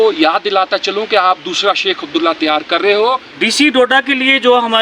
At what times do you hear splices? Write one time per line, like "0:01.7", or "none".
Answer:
0:03.3